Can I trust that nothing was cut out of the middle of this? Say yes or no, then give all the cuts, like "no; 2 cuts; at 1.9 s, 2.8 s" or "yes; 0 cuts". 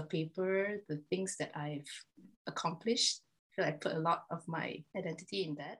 no; 1 cut; at 4.8 s